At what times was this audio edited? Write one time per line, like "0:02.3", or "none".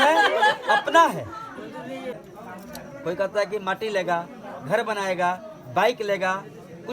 0:02.2